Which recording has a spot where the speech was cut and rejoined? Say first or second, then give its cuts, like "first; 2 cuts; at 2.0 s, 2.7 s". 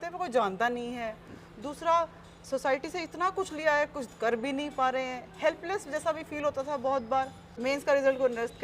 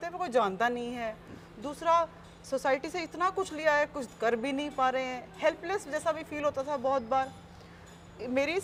first; 1 cut; at 7.4 s